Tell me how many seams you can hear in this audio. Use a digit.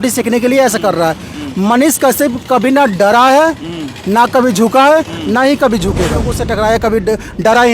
1